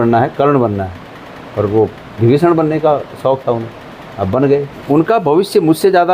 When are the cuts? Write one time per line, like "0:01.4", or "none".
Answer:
0:04.7